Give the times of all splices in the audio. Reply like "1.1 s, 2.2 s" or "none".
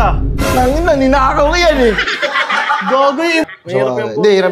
3.4 s